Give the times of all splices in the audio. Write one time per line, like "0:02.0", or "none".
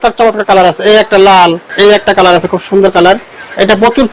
0:01.7

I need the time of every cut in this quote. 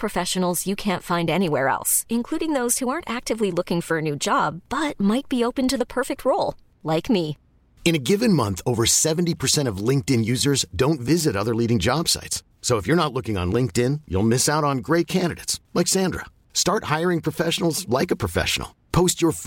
none

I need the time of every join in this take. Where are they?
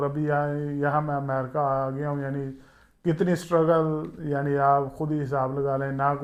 none

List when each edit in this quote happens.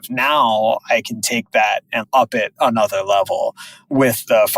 0:02.0

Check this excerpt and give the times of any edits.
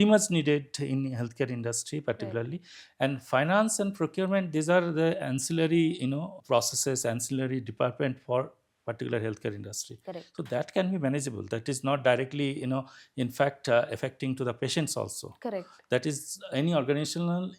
none

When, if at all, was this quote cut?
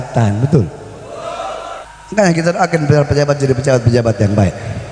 0:01.9

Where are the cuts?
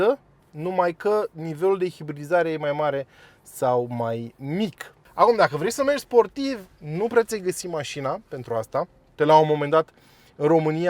0:04.9
0:09.0

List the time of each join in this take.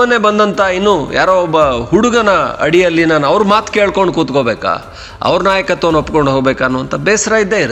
none

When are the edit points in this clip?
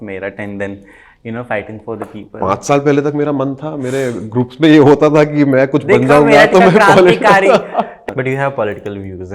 0:08.0

